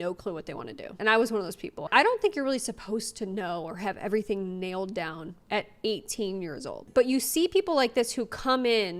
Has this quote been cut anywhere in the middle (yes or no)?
yes